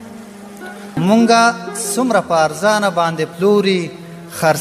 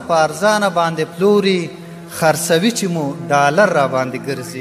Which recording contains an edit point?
first; 1 cut; at 1.0 s

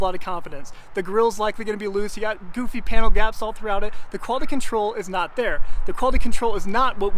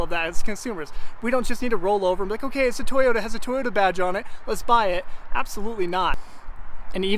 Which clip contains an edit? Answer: second; 1 cut; at 6.2 s

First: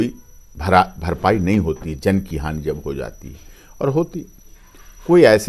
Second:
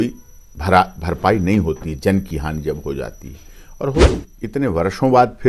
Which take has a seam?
second; 1 cut; at 4.2 s

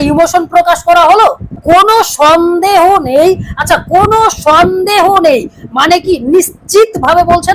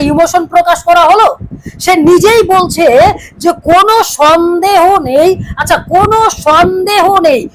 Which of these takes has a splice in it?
first; 1 cut; at 1.6 s

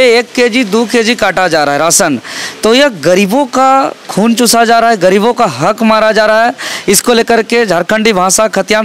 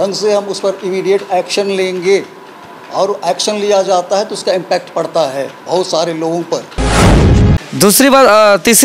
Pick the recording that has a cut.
second; 1 cut; at 7.1 s

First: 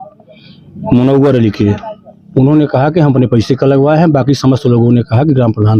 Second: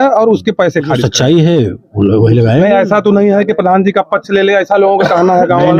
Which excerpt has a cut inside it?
second; 1 cut; at 1.0 s

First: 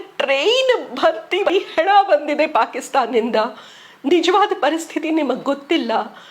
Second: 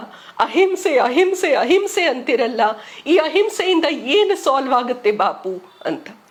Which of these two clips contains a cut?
first; 1 cut; at 1.5 s

